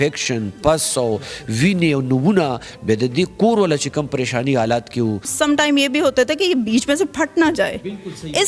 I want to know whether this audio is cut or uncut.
cut